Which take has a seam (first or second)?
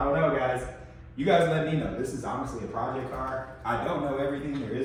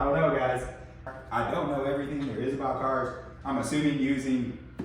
second